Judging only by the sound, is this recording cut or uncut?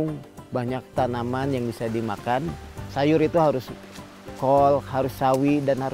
cut